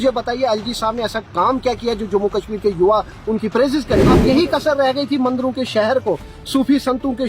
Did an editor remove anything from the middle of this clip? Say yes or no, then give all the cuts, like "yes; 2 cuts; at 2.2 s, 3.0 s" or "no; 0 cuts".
yes; 1 cut; at 4.1 s